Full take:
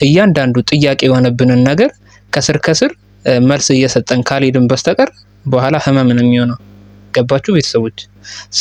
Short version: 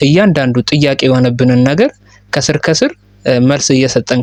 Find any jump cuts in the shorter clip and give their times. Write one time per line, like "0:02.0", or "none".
none